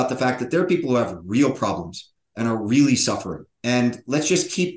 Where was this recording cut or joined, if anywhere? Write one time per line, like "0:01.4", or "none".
0:03.5

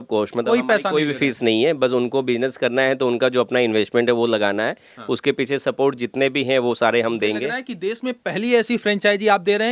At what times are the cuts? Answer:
none

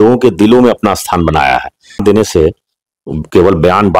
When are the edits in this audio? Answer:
0:02.0

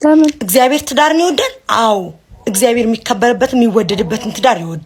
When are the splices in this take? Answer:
none

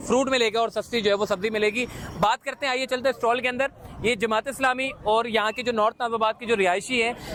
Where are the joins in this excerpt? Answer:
none

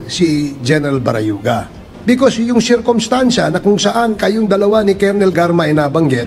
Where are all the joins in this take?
0:01.9

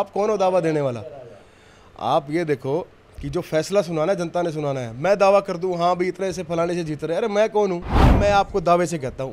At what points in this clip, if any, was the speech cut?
0:08.1

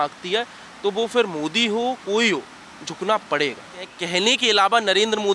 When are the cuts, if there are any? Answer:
0:04.0

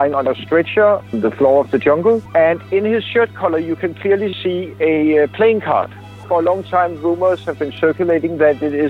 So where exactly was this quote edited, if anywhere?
0:01.1
0:02.2
0:06.2

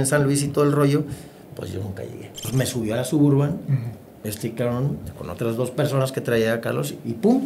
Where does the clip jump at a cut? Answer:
0:02.4

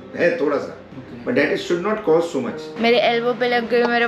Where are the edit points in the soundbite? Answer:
0:02.7

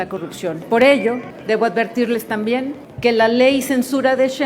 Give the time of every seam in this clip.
0:01.3
0:02.8

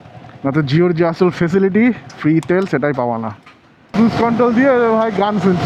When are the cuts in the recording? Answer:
0:03.9

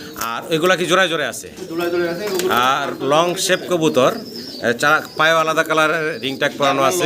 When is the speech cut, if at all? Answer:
none

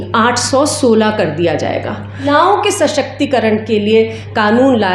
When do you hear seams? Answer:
0:02.3

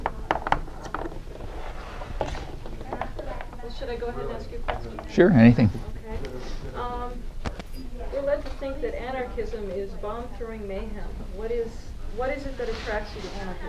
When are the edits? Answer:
none

